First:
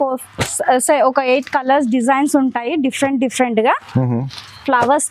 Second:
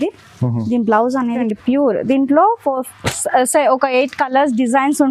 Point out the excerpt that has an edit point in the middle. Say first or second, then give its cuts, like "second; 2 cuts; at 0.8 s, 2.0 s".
second; 1 cut; at 1.4 s